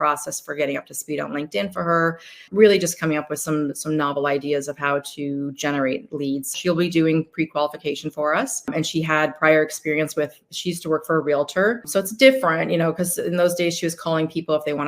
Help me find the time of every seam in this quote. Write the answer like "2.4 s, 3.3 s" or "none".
2.5 s, 6.5 s, 8.7 s, 11.9 s